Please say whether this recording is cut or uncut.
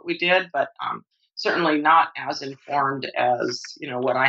uncut